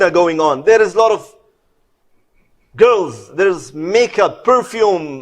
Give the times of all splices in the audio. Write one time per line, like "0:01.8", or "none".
none